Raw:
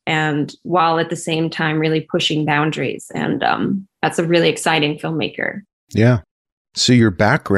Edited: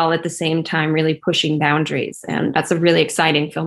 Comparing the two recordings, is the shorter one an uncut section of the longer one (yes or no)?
no